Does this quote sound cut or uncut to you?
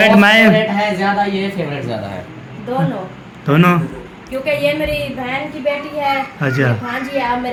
uncut